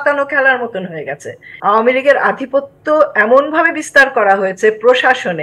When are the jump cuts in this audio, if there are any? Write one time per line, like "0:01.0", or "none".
0:01.4

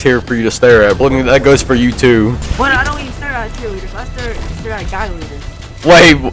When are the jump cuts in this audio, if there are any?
0:01.0
0:02.5

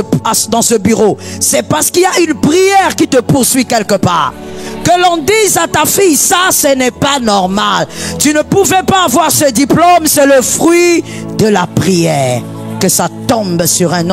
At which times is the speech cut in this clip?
none

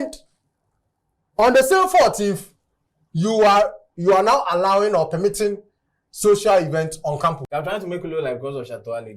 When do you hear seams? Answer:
0:07.4

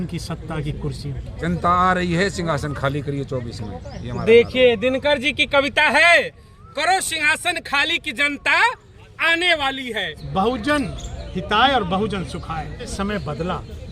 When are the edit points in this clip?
0:01.3
0:10.1
0:12.9

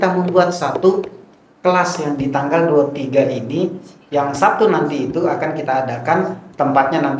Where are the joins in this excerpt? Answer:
none

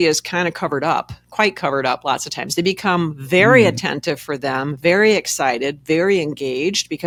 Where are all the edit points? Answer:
none

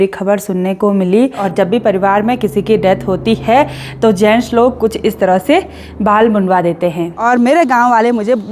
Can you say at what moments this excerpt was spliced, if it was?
0:01.4
0:07.2

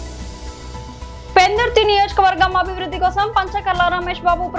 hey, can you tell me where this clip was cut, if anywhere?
none

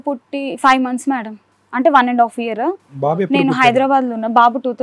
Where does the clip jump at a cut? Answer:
none

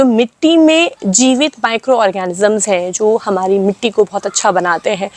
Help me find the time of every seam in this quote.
none

